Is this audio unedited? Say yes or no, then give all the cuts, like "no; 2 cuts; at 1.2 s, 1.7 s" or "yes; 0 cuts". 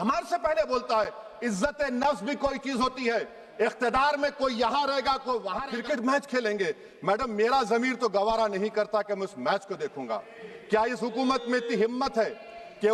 no; 1 cut; at 5.6 s